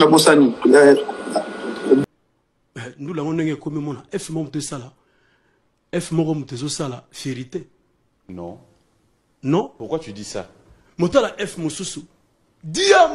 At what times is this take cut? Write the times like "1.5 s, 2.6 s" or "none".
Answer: 2.0 s